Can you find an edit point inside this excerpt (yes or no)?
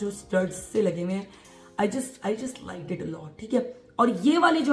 no